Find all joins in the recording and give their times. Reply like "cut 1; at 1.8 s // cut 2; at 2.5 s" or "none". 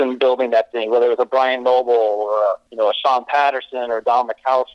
cut 1; at 2.7 s